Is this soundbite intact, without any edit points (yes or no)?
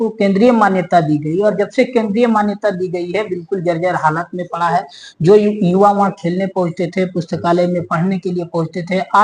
yes